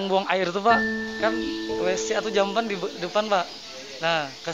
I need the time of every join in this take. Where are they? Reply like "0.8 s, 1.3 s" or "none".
none